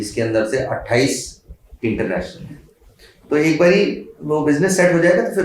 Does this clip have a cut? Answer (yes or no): no